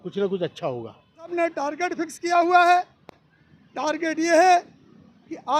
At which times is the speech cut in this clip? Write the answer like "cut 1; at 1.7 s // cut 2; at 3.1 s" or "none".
cut 1; at 1.3 s